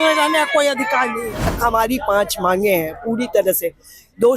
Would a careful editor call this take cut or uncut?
cut